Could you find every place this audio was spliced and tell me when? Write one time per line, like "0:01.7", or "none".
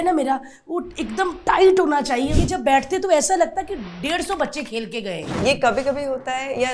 0:02.3
0:05.3